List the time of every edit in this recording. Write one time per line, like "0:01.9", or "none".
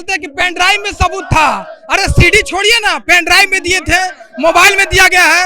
none